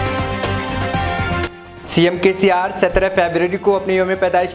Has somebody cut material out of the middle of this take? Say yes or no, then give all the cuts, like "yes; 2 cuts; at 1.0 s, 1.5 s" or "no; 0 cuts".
yes; 1 cut; at 1.5 s